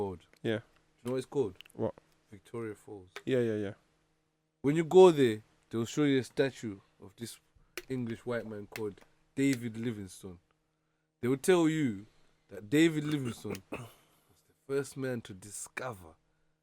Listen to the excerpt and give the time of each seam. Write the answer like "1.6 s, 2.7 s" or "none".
none